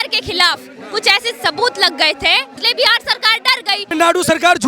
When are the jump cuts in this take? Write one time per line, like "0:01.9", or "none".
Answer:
0:02.6
0:03.9

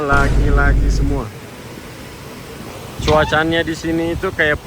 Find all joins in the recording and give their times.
none

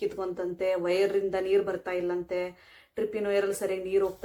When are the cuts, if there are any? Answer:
none

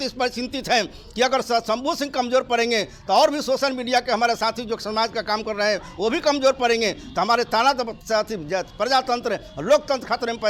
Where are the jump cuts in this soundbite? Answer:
none

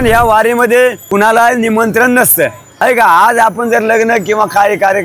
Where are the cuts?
0:01.0
0:02.7

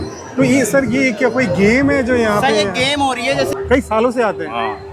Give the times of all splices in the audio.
0:03.5

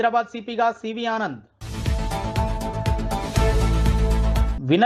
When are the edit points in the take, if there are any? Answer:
none

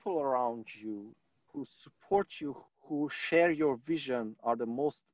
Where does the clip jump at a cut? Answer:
0:01.2
0:02.6

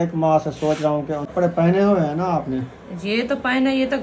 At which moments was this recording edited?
0:01.3

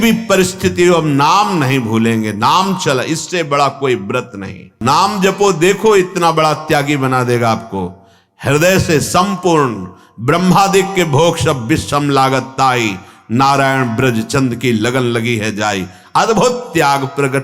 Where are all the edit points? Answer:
0:04.8

